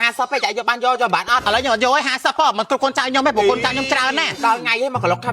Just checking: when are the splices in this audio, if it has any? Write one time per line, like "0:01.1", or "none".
0:01.4